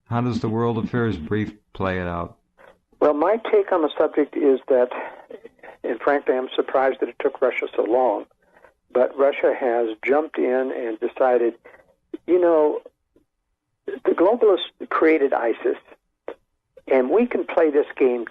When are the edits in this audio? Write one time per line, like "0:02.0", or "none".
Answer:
0:02.9